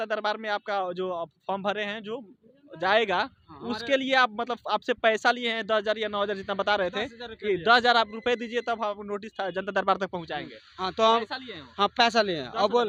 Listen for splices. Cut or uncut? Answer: uncut